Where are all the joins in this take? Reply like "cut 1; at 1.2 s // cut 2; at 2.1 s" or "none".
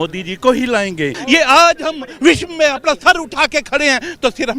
cut 1; at 1.1 s